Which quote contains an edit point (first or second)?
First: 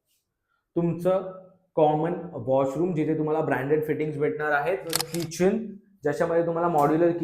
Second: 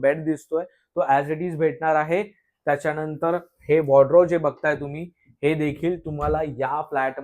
first